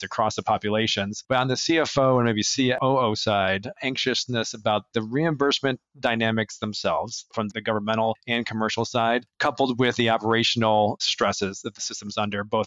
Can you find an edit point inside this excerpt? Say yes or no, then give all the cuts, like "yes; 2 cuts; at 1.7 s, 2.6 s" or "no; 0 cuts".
yes; 1 cut; at 7.3 s